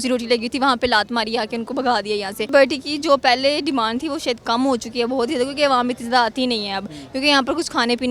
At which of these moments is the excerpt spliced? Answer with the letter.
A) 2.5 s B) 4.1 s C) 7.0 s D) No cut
A